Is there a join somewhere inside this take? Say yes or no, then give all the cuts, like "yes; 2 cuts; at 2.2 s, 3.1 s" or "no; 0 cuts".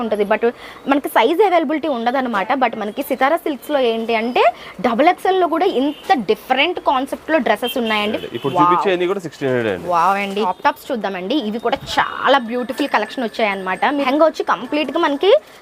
yes; 3 cuts; at 8.2 s, 10.5 s, 14.1 s